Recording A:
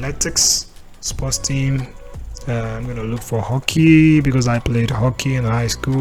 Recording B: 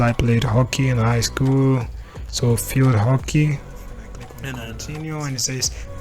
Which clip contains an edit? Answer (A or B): B